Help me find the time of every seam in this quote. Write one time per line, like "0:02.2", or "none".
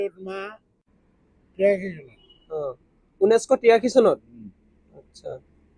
0:00.9